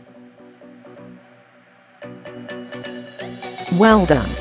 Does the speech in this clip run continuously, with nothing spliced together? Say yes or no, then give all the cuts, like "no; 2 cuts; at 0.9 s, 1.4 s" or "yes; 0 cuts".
no; 1 cut; at 3.0 s